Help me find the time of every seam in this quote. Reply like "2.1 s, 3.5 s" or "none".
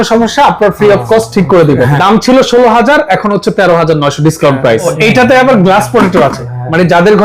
2.0 s, 4.9 s